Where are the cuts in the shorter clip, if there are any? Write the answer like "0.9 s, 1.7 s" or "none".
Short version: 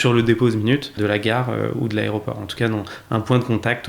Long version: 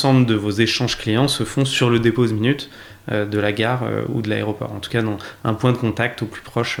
1.0 s